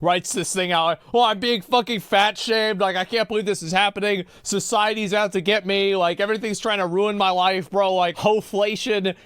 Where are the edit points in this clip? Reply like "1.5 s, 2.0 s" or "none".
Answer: 8.1 s